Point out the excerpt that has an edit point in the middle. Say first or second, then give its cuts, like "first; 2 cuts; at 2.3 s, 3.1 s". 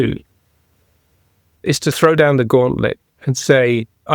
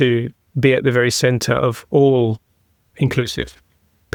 first; 1 cut; at 1.5 s